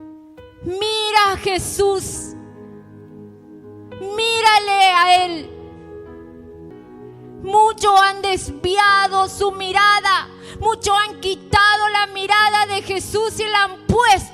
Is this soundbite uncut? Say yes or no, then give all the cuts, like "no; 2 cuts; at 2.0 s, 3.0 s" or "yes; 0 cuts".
no; 1 cut; at 6.7 s